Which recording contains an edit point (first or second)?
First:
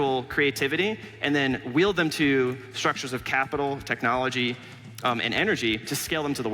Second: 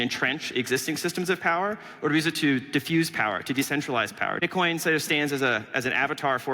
second